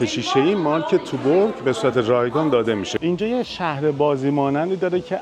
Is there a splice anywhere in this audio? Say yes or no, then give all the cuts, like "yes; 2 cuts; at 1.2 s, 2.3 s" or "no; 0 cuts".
yes; 1 cut; at 2.9 s